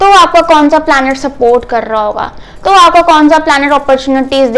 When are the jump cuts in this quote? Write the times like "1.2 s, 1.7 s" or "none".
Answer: none